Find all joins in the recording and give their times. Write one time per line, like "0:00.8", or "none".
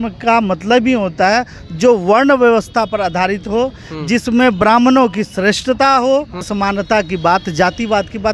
0:06.5